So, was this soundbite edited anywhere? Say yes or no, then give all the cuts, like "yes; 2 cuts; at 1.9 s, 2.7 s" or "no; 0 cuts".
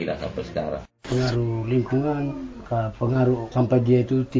yes; 3 cuts; at 0.9 s, 2.5 s, 3.5 s